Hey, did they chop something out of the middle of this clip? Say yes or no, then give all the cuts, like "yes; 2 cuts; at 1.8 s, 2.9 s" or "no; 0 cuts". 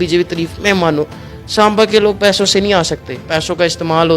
yes; 1 cut; at 3.3 s